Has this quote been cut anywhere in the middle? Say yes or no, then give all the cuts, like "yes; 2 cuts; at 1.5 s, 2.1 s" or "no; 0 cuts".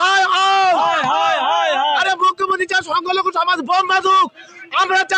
no; 0 cuts